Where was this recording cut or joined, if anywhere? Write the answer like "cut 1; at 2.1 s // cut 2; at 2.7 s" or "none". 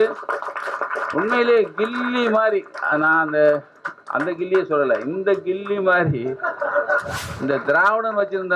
cut 1; at 7.2 s